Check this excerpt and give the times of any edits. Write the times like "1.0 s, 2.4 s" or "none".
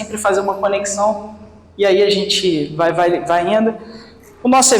none